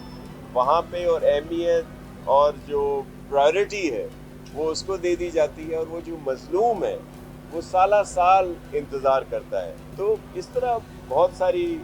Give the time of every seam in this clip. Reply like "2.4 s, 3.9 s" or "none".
9.8 s